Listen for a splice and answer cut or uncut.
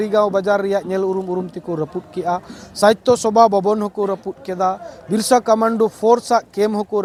uncut